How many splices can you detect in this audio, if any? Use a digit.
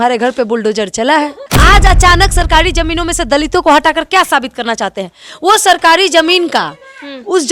1